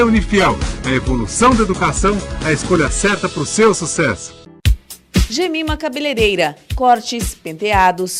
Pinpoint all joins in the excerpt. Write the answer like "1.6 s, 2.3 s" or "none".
4.4 s